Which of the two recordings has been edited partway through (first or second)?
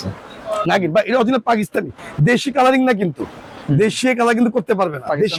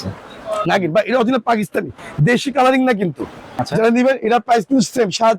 second